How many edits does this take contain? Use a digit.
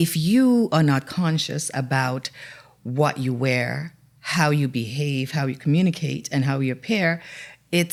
0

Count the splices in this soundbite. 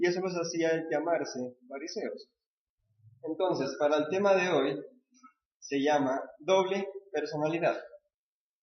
1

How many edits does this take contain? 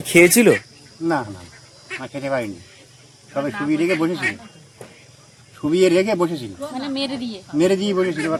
0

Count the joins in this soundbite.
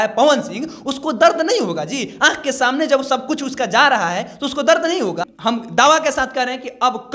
1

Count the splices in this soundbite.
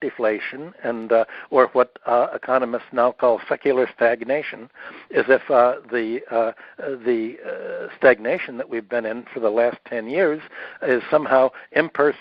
0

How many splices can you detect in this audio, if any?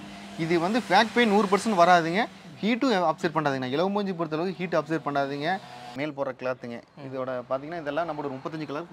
1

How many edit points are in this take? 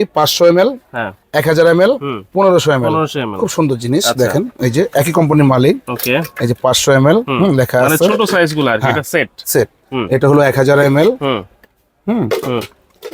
0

